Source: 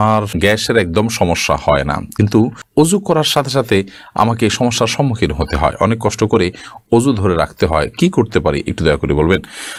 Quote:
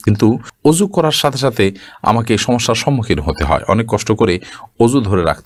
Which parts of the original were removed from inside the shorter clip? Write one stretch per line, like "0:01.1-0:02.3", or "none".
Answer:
none